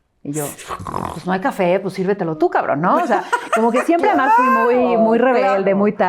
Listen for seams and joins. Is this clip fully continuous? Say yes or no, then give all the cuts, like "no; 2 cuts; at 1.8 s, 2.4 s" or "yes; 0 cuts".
yes; 0 cuts